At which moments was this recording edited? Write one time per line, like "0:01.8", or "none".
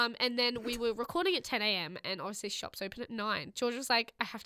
none